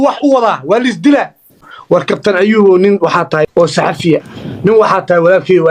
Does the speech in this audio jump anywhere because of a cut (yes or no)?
yes